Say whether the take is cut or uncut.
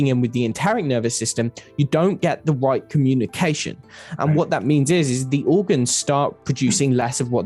uncut